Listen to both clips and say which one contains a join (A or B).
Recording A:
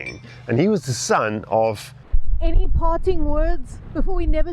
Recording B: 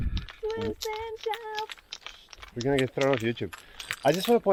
A